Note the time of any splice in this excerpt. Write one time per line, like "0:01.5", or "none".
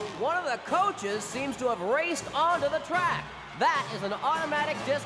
none